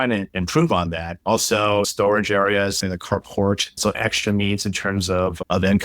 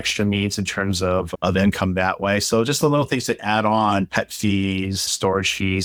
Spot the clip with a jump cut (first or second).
first